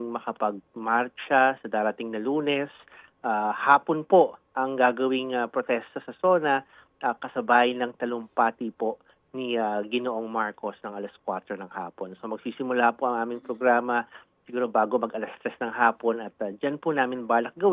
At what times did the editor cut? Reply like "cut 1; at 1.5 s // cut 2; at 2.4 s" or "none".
none